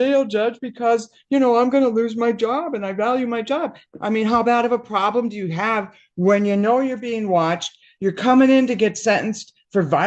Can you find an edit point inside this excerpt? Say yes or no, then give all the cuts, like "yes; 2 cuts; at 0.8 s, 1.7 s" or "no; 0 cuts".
yes; 1 cut; at 3.8 s